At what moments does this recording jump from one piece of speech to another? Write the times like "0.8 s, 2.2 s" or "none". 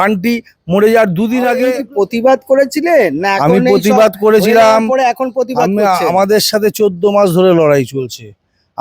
1.8 s

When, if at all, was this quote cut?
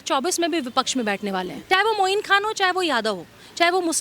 1.6 s

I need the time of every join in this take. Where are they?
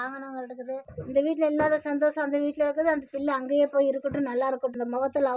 0.9 s

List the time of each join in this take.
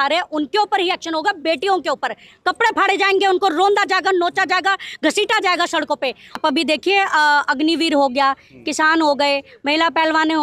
6.3 s

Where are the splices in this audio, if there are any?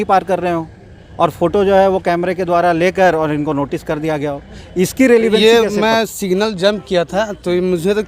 5.4 s

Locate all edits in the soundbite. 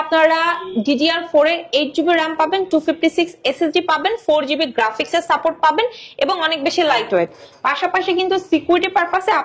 none

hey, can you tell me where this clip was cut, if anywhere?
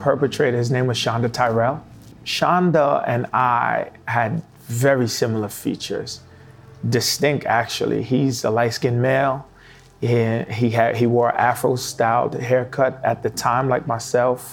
none

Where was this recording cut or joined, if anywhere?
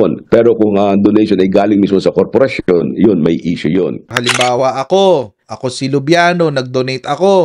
4.1 s

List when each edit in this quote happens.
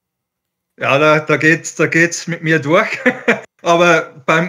3.5 s

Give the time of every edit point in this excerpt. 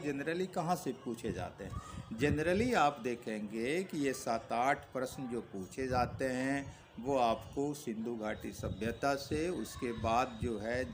none

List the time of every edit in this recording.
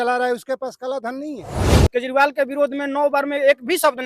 1.8 s

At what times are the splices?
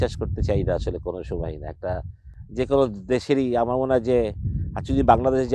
none

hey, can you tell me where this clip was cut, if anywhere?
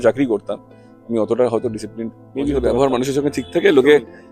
2.6 s

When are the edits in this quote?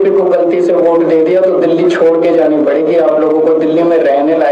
none

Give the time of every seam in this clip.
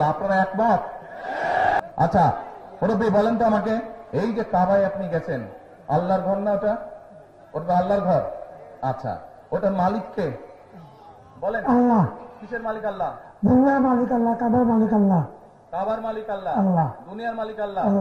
1.8 s

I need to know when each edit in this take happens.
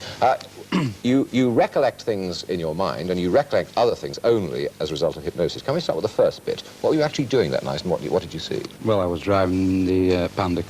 none

